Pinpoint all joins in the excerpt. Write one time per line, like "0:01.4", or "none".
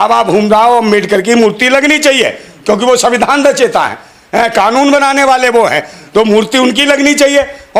none